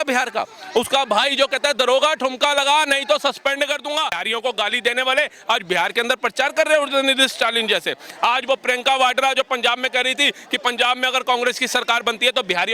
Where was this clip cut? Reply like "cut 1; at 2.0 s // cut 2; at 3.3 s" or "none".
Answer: cut 1; at 4.2 s